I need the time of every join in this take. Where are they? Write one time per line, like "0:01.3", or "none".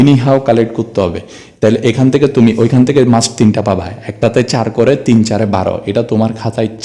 none